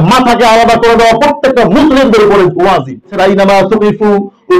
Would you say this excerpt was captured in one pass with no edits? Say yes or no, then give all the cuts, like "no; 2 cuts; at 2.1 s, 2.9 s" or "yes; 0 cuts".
no; 1 cut; at 3.1 s